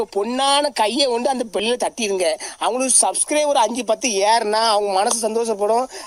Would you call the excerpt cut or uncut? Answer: uncut